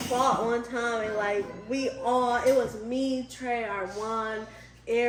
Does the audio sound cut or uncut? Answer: uncut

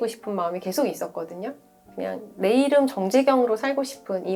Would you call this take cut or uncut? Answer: uncut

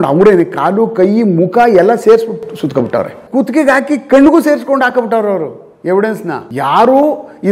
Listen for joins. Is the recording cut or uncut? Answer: cut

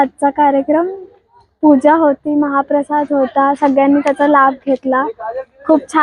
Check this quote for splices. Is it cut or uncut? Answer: uncut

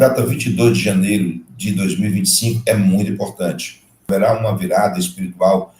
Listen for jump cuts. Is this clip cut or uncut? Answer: cut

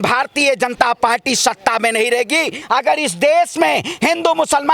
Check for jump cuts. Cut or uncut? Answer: cut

